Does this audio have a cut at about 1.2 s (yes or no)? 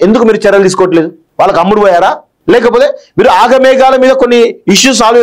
yes